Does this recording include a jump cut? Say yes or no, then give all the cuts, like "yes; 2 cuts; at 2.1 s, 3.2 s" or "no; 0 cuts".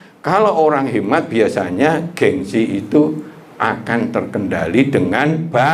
no; 0 cuts